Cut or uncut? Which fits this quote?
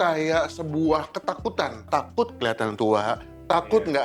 cut